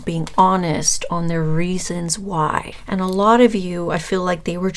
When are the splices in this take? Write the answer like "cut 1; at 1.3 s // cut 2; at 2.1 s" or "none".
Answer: cut 1; at 2.8 s